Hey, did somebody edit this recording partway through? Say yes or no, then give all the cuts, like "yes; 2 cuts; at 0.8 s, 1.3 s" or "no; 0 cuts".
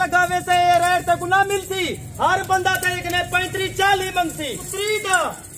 yes; 1 cut; at 4.6 s